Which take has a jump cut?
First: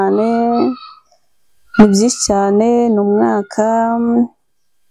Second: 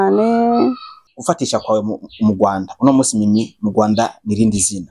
second; 1 cut; at 1.1 s

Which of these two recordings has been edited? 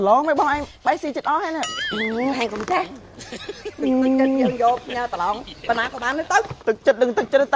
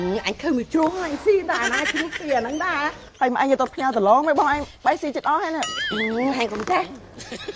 second; 1 cut; at 3.0 s

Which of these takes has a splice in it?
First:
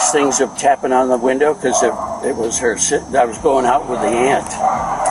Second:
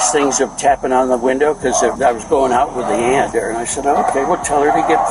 second; 2 cuts; at 2.0 s, 3.3 s

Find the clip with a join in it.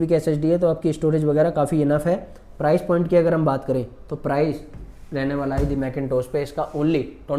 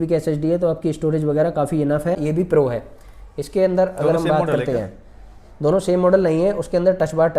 second; 1 cut; at 2.2 s

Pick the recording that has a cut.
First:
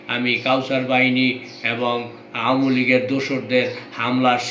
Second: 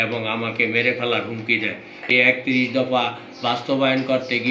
second; 1 cut; at 2.1 s

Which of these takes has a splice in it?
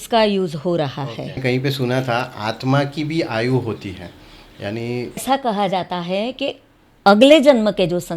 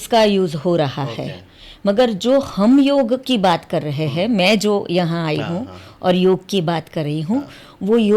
first; 2 cuts; at 1.4 s, 5.2 s

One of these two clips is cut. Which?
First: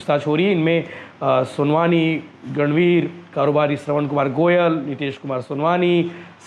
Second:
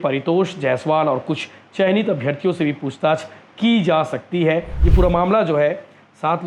second; 1 cut; at 4.8 s

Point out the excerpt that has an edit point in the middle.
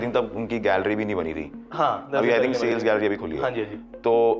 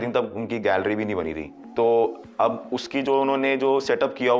second; 1 cut; at 1.6 s

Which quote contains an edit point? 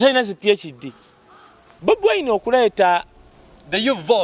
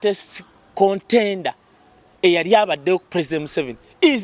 first; 1 cut; at 1.6 s

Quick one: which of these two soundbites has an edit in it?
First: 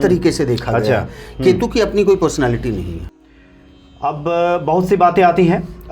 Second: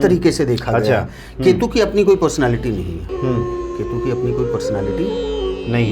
first; 1 cut; at 3.0 s

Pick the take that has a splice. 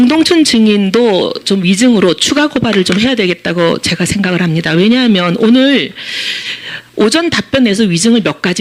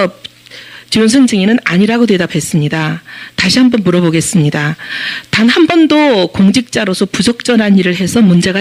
first; 1 cut; at 3.4 s

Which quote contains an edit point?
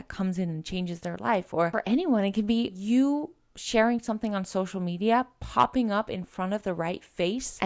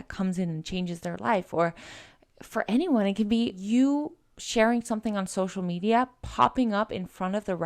first; 1 cut; at 1.7 s

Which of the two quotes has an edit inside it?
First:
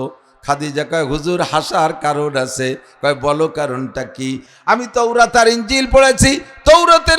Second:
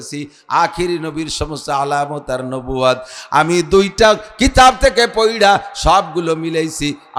first; 1 cut; at 4.5 s

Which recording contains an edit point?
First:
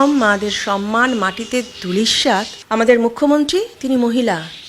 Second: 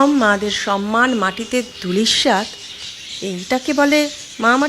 first; 1 cut; at 2.6 s

